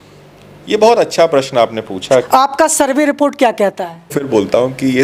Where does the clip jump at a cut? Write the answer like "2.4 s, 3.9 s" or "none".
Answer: 2.3 s, 4.2 s